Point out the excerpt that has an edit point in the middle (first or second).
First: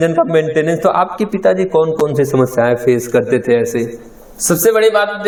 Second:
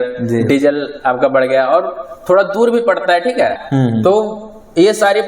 second